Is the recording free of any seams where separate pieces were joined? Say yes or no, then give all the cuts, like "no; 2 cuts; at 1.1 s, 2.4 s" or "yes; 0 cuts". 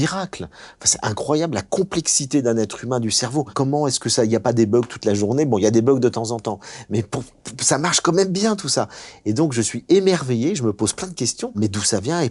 no; 2 cuts; at 3.5 s, 11.6 s